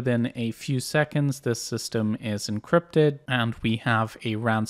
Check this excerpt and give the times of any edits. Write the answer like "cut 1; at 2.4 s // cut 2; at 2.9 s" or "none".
cut 1; at 3.2 s